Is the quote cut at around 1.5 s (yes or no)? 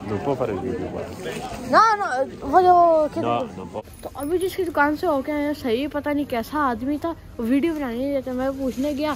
no